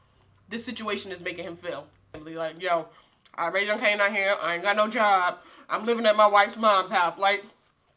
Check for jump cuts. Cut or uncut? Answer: cut